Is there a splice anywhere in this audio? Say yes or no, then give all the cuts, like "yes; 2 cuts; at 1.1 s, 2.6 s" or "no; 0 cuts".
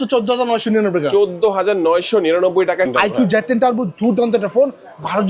yes; 1 cut; at 2.9 s